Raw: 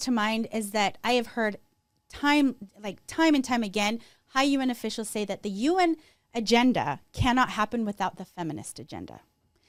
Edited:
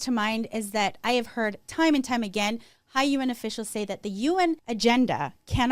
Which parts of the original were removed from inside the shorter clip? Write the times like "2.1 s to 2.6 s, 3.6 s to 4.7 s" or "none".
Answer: 1.6 s to 3.0 s, 6.1 s to 6.3 s